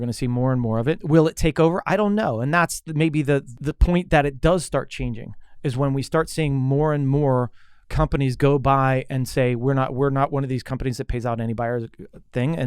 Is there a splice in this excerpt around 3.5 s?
yes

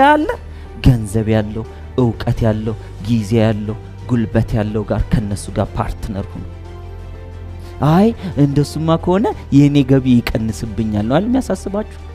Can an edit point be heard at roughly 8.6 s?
no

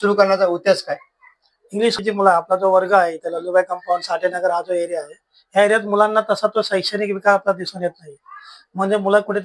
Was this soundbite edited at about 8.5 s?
no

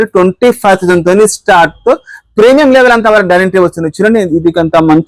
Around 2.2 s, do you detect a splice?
no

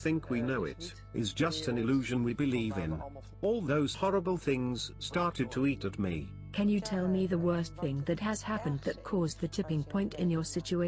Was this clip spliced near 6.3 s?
yes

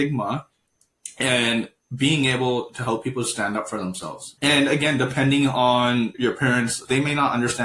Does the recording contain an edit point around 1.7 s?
no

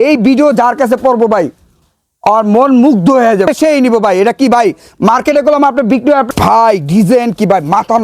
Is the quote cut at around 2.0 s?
no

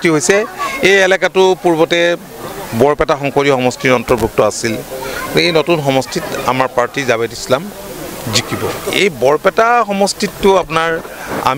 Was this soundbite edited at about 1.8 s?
no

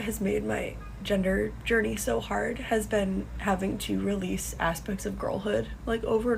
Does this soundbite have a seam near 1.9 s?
no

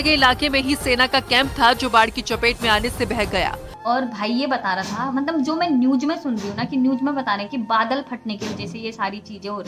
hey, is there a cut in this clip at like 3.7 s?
yes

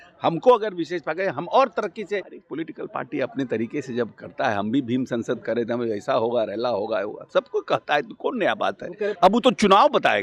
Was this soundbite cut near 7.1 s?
no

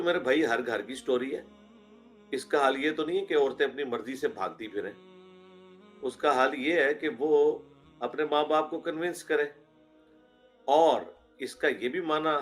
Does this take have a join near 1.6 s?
no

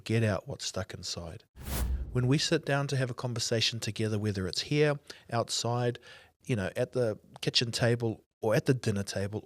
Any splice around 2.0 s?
yes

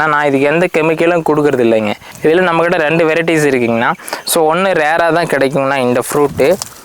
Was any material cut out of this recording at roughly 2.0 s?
yes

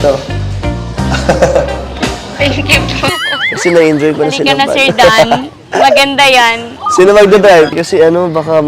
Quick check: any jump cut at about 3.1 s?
yes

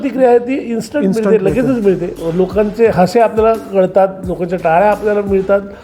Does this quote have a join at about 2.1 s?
yes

